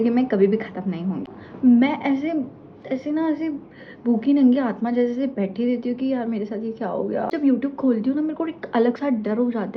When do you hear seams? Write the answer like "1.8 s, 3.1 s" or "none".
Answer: 1.4 s, 7.3 s